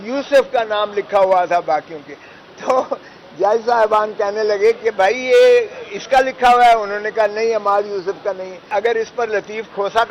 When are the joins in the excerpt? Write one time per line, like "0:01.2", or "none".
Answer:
0:08.7